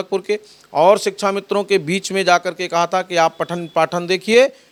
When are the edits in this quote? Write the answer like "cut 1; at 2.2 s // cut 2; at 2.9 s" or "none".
none